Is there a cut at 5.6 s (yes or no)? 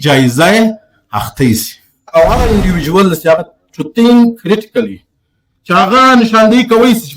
no